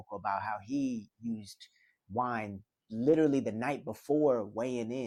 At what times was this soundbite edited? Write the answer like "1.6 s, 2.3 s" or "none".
none